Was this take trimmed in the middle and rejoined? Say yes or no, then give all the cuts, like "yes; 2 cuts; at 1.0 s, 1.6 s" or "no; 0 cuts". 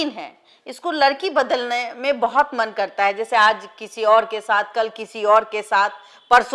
no; 0 cuts